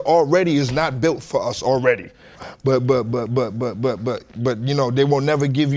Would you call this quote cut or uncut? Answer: cut